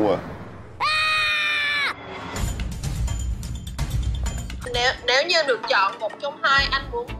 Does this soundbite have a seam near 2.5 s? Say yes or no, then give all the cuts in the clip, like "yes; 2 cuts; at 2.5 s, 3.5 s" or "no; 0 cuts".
no; 1 cut; at 4.7 s